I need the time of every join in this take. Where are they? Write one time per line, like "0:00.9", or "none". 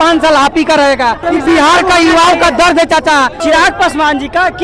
0:01.2
0:03.4